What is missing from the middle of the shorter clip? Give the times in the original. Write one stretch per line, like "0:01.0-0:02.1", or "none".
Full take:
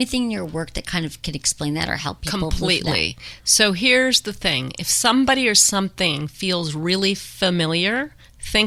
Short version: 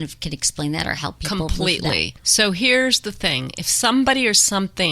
0:03.2-0:03.4